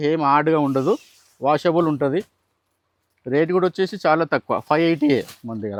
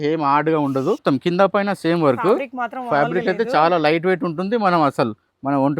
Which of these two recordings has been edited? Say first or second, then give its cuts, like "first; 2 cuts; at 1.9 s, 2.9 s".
second; 1 cut; at 1.0 s